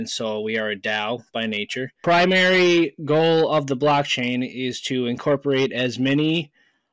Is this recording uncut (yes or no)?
no